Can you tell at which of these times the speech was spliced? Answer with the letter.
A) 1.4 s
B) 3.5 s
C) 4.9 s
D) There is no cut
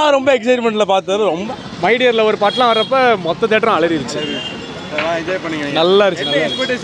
A